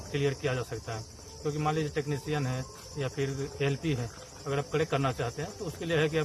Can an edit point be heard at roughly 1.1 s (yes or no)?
no